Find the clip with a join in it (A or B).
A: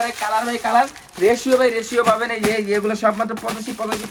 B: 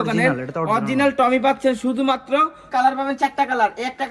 B